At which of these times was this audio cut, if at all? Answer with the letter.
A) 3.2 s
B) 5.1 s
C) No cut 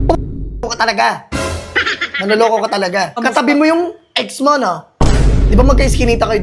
A